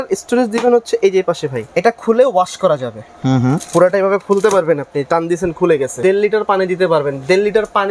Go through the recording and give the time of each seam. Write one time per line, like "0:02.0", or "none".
0:01.6
0:06.0